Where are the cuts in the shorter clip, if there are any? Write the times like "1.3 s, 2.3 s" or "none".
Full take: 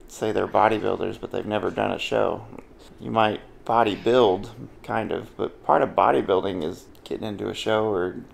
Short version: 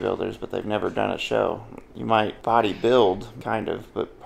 2.2 s, 3.3 s